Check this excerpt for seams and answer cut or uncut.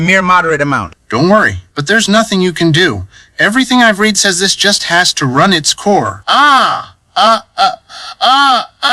cut